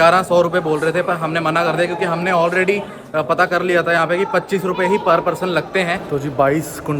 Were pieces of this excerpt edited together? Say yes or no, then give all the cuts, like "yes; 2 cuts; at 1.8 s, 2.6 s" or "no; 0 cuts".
yes; 1 cut; at 6.0 s